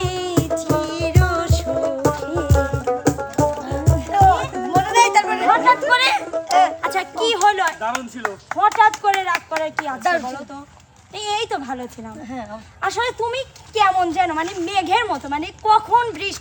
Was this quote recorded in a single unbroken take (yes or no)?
yes